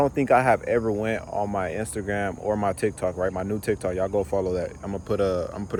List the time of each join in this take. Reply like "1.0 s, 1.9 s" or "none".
none